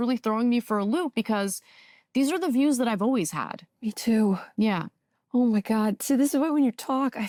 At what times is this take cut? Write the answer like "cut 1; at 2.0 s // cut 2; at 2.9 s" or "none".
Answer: none